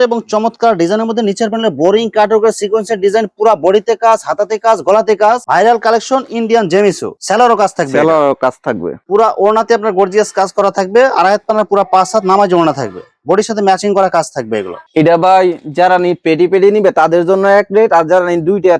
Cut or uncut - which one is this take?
uncut